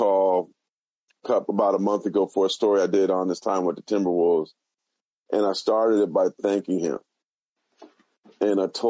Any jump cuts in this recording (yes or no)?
no